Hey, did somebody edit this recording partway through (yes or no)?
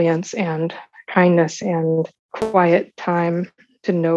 yes